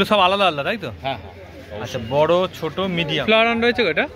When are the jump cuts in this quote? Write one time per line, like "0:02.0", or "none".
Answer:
0:03.2